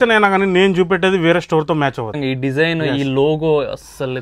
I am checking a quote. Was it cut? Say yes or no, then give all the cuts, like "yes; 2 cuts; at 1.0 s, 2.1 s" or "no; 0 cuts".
yes; 1 cut; at 2.2 s